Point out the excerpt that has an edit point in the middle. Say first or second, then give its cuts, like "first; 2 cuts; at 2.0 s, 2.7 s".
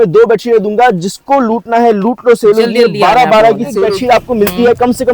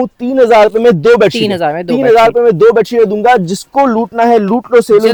first; 1 cut; at 3.7 s